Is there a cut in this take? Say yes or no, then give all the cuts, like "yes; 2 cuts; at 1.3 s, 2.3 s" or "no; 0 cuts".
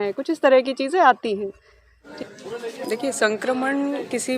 yes; 1 cut; at 2.1 s